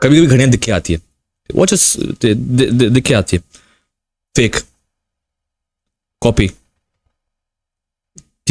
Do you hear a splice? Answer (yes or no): no